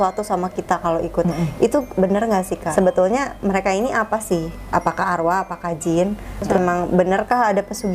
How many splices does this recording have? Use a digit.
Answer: 2